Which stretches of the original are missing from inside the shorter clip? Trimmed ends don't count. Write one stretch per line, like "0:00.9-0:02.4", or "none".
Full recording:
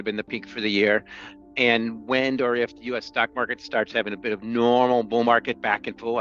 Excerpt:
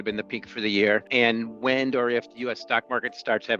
0:01.1-0:01.5